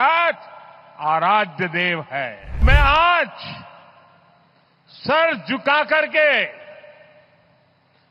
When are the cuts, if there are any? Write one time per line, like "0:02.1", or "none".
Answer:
0:02.6

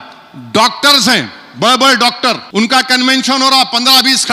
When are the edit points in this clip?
0:02.4

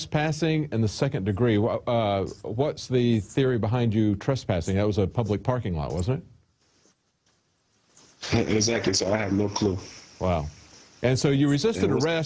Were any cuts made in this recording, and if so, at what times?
0:05.4

